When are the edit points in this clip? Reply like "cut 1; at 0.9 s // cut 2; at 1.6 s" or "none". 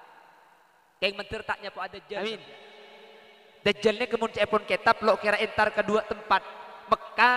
cut 1; at 2.2 s